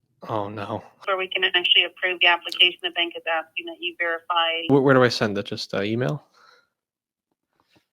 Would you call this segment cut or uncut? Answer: cut